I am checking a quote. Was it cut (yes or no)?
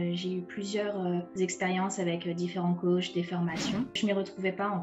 yes